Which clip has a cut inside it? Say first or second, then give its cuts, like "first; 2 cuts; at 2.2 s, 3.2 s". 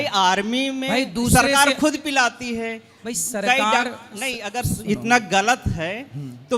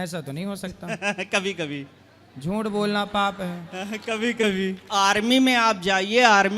second; 1 cut; at 4.9 s